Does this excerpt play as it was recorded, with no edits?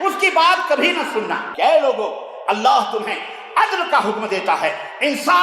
no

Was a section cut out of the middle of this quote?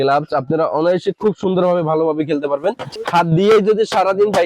yes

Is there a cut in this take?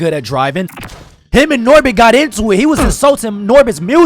yes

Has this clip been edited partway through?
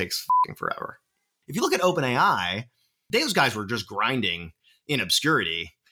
yes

